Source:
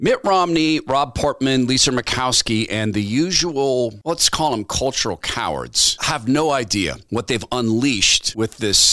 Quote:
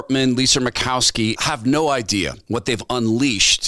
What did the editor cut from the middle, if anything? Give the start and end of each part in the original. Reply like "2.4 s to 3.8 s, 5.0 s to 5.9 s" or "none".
2.7 s to 6.0 s